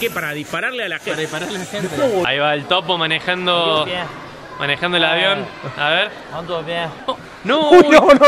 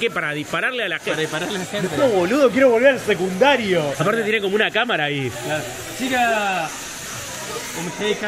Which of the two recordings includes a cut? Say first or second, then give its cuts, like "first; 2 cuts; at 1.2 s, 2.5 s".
first; 2 cuts; at 2.2 s, 7.0 s